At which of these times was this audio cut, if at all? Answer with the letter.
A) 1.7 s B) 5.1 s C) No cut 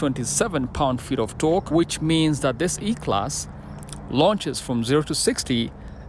A